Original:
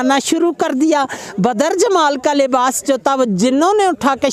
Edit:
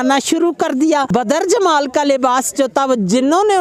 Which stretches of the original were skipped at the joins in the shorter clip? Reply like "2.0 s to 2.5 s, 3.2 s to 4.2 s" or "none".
1.1 s to 1.4 s